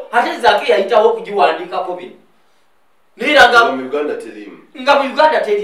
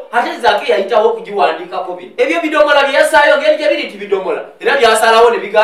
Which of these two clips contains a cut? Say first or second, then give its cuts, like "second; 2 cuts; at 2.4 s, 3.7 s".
second; 1 cut; at 2.0 s